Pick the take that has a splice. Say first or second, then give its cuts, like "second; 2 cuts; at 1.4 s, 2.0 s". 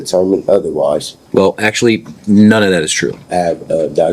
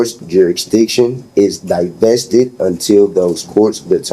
first; 2 cuts; at 1.2 s, 3.2 s